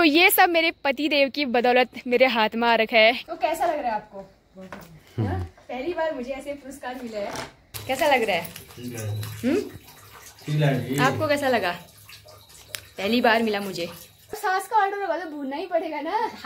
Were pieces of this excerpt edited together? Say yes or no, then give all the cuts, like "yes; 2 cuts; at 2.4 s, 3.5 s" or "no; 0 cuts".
yes; 3 cuts; at 3.3 s, 7.7 s, 14.2 s